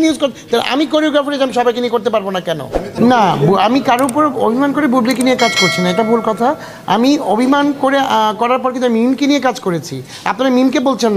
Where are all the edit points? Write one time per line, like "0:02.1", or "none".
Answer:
0:03.1